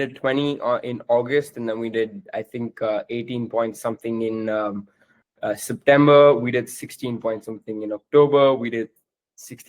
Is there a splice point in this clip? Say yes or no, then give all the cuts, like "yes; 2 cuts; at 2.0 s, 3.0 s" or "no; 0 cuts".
no; 0 cuts